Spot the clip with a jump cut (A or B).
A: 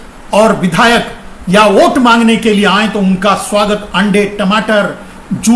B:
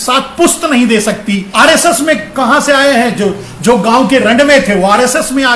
B